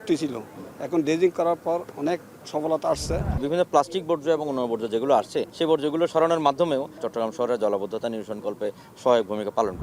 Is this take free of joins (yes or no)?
no